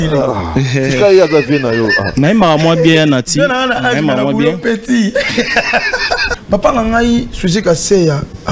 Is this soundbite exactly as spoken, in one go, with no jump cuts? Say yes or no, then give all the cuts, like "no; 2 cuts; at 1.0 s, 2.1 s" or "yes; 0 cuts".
no; 1 cut; at 6.3 s